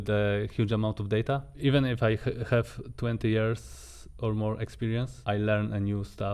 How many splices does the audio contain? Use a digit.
2